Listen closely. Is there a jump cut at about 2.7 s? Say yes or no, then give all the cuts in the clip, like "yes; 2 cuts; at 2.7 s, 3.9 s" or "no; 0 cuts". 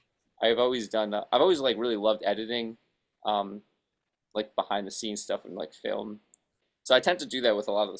no; 1 cut; at 6.6 s